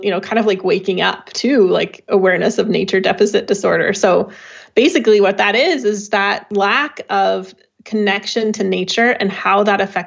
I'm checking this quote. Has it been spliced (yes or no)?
yes